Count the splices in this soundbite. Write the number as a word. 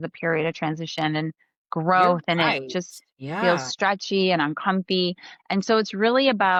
zero